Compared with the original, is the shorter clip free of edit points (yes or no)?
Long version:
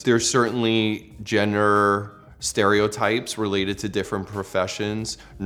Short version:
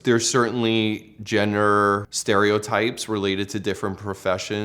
no